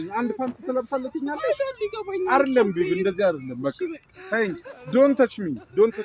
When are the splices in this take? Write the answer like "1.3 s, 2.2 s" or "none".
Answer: none